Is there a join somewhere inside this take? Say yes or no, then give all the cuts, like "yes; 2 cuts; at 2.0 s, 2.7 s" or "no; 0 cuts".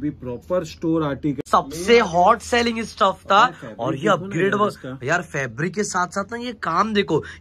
yes; 1 cut; at 1.4 s